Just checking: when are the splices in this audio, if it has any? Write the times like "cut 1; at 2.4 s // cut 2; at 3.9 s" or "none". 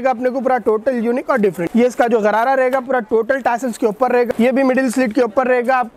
cut 1; at 1.6 s // cut 2; at 4.3 s

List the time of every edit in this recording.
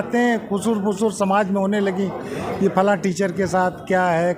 none

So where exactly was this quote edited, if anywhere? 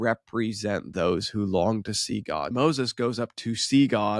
cut 1; at 2.5 s

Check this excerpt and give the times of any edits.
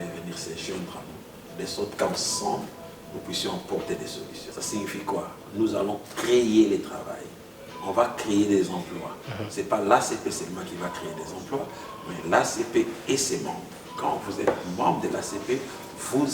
cut 1; at 4.5 s

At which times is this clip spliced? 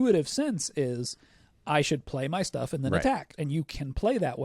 cut 1; at 3.3 s

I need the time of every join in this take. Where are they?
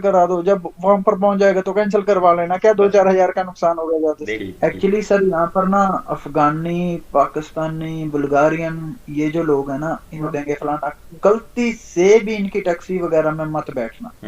cut 1; at 4.4 s // cut 2; at 10.3 s

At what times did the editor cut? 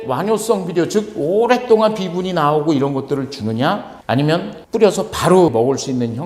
none

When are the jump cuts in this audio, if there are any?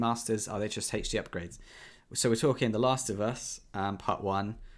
none

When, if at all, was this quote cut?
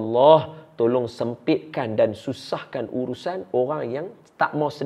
none

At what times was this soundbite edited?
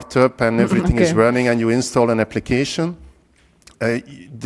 none

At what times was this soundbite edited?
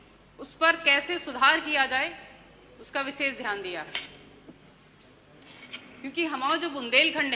none

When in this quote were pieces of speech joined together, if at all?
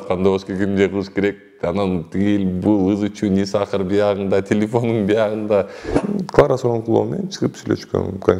cut 1; at 6.0 s

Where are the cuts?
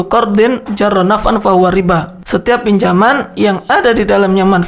cut 1; at 2.2 s

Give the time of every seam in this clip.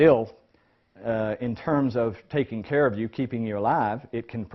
cut 1; at 2.5 s

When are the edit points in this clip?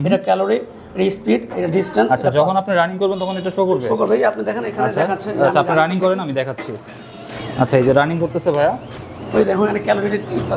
none

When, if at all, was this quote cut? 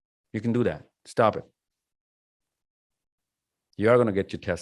none

